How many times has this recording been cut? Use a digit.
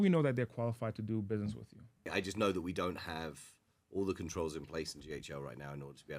1